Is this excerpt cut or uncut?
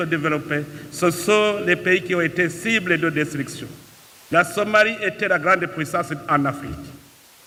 uncut